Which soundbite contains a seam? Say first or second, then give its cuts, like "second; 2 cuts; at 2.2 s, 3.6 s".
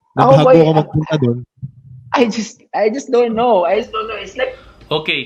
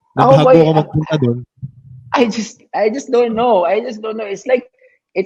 second; 1 cut; at 3.8 s